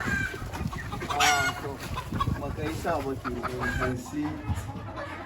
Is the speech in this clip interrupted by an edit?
yes; 1 cut; at 3.6 s

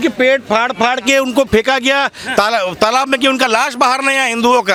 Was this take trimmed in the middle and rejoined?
no; 0 cuts

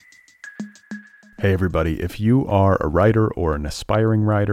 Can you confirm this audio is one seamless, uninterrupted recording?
no; 1 cut; at 0.9 s

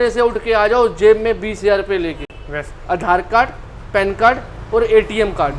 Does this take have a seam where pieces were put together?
no; 0 cuts

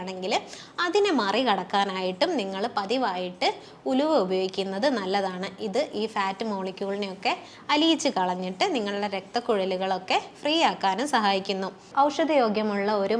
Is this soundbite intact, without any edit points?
no; 1 cut; at 11.8 s

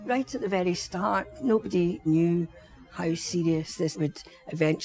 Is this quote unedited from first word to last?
no; 2 cuts; at 2.1 s, 3.9 s

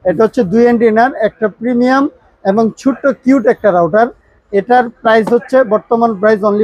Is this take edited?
no; 0 cuts

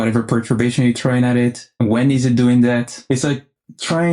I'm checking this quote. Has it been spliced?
yes; 2 cuts; at 1.8 s, 2.9 s

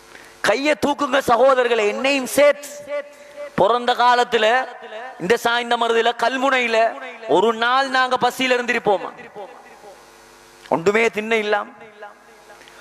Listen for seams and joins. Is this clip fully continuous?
yes; 0 cuts

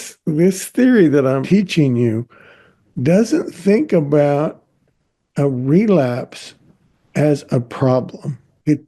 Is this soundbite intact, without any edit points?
no; 1 cut; at 1.4 s

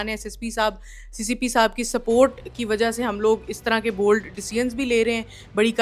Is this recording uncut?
yes; 0 cuts

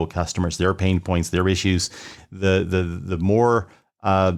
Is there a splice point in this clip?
no; 0 cuts

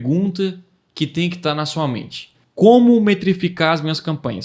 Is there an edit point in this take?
yes; 1 cut; at 2.4 s

